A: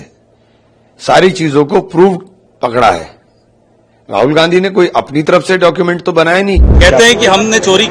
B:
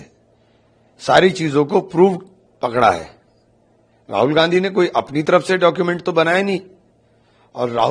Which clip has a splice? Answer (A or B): A